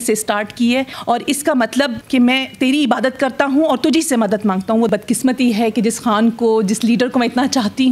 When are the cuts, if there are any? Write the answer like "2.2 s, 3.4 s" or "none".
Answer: 0.9 s, 2.0 s, 4.9 s